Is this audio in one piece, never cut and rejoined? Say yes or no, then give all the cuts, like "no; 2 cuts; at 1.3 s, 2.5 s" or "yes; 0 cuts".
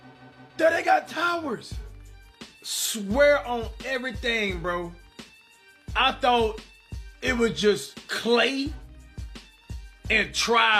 yes; 0 cuts